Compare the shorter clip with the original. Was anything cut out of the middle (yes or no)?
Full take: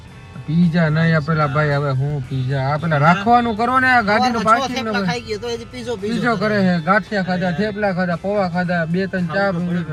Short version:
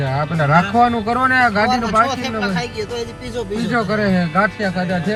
no